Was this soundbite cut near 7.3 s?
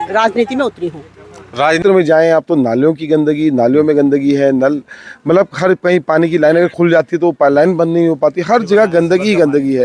no; 1 cut; at 1.8 s

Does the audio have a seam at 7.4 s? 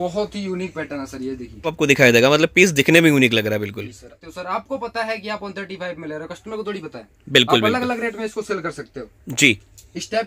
no; 2 cuts; at 1.7 s, 4.1 s

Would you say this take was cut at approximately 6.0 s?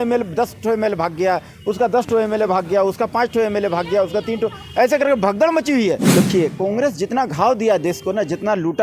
yes; 1 cut; at 6.0 s

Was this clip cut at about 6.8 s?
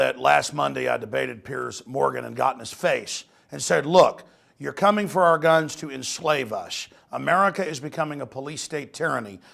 no; 1 cut; at 1.3 s

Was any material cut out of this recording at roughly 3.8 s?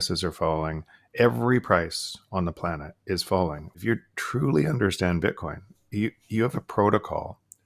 yes; 2 cuts; at 1.0 s, 3.8 s

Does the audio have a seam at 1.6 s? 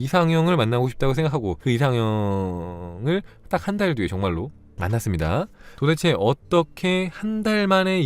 yes; 1 cut; at 1.6 s

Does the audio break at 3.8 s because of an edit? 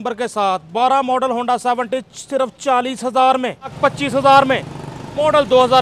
yes; 1 cut; at 3.8 s

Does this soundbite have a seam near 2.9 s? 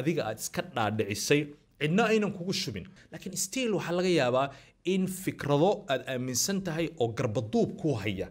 yes; 1 cut; at 2.9 s

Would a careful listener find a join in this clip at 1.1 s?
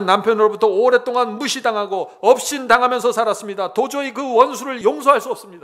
no; 1 cut; at 4.7 s

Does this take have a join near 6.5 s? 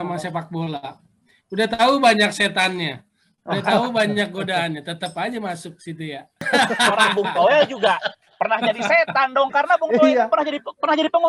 yes; 1 cut; at 6.5 s

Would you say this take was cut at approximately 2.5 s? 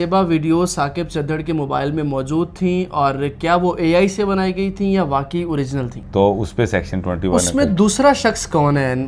no; 1 cut; at 6.0 s

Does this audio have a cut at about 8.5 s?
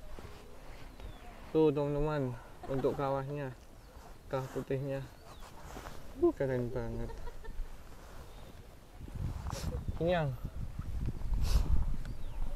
no; 0 cuts

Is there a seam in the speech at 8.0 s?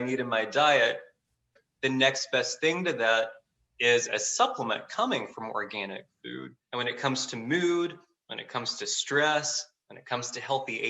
no; 2 cuts; at 1.6 s, 6.5 s

